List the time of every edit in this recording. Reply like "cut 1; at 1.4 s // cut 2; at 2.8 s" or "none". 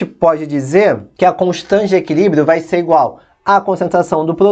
cut 1; at 1.1 s

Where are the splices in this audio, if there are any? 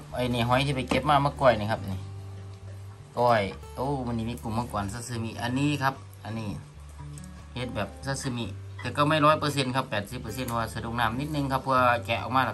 none

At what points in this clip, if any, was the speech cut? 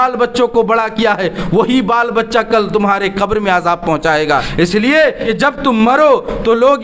cut 1; at 4.5 s // cut 2; at 5.2 s

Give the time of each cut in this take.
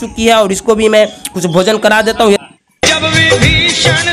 cut 1; at 2.4 s

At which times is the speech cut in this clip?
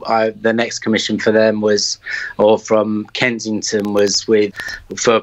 none

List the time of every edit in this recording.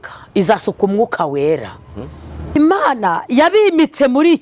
cut 1; at 2.5 s

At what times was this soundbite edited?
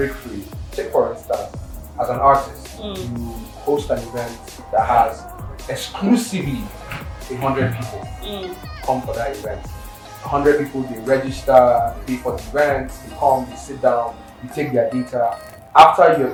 none

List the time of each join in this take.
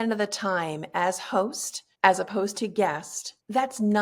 none

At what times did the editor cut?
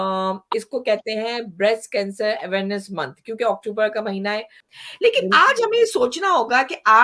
cut 1; at 4.6 s

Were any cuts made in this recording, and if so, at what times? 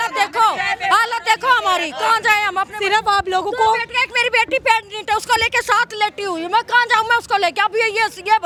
none

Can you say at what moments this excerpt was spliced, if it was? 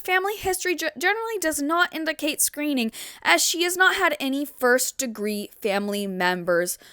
none

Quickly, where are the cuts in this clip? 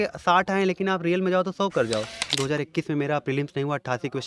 cut 1; at 2.2 s

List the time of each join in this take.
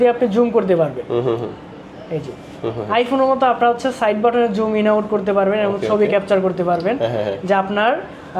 none

